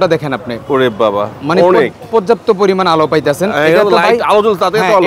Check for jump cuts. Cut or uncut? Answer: uncut